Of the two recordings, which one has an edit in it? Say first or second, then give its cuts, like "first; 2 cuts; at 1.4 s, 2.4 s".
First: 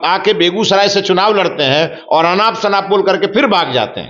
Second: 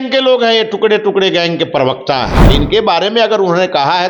second; 1 cut; at 2.4 s